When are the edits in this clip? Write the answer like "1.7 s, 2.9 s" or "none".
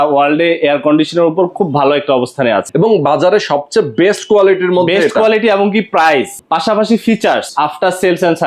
2.7 s, 6.4 s, 7.5 s